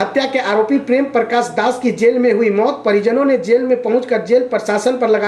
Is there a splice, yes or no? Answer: no